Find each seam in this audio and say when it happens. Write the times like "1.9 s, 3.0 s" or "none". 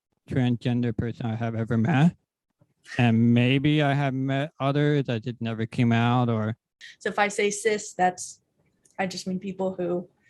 6.8 s